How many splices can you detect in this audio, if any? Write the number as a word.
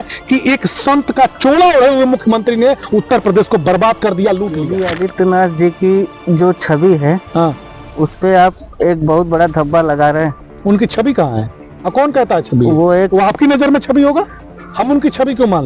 one